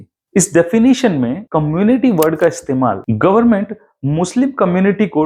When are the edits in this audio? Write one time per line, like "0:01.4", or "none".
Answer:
none